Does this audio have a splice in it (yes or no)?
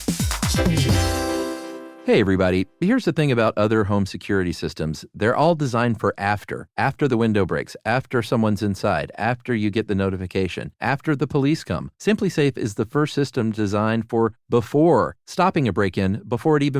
yes